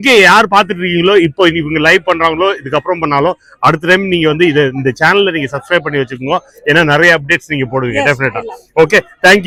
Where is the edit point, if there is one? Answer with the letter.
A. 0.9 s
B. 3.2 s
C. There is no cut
C